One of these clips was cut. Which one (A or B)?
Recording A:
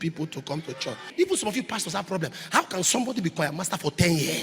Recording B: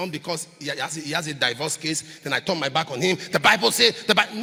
A